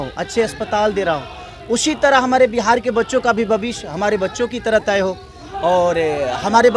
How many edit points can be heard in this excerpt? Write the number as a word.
zero